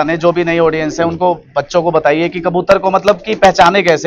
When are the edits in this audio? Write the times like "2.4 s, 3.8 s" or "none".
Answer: none